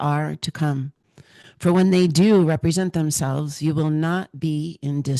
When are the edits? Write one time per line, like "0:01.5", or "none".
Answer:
none